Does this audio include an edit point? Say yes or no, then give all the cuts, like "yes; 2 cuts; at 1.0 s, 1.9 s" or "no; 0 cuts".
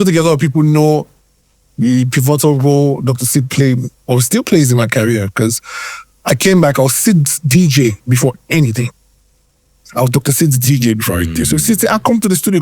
no; 0 cuts